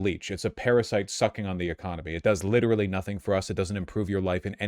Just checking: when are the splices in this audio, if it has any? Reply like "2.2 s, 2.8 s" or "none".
none